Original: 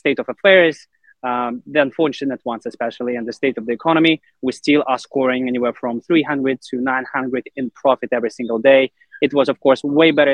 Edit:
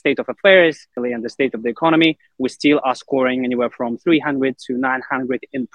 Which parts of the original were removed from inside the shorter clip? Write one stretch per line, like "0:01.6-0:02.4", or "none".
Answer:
0:00.9-0:02.9